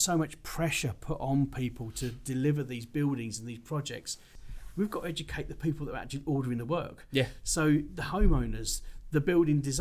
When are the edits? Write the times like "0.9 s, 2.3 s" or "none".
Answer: 4.3 s